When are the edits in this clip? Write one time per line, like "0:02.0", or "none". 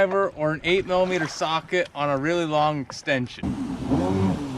0:03.5